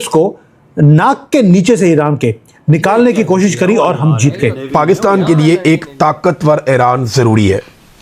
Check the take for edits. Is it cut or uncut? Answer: cut